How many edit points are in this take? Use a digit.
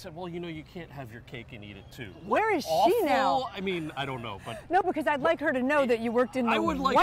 1